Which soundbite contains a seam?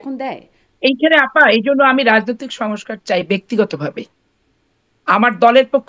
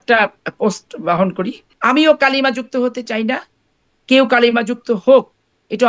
second; 1 cut; at 1.6 s

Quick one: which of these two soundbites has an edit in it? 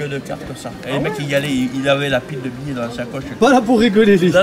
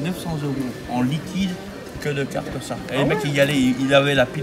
first; 1 cut; at 3.4 s

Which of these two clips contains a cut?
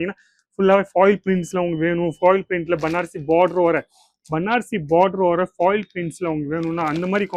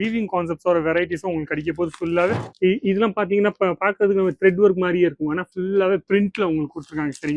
second; 1 cut; at 2.4 s

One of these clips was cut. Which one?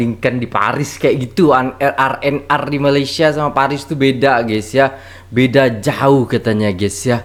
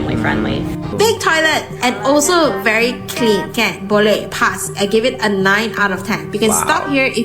second; 1 cut; at 1.1 s

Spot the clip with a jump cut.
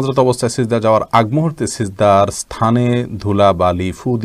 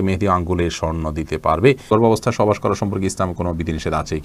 second; 1 cut; at 1.9 s

